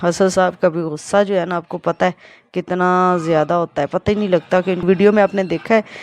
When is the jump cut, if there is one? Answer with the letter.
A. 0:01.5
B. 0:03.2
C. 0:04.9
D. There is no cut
C